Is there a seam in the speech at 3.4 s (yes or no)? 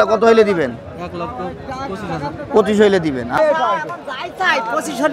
yes